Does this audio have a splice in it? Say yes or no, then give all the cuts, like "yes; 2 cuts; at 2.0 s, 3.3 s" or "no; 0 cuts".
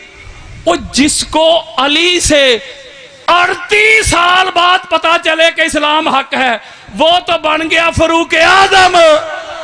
no; 0 cuts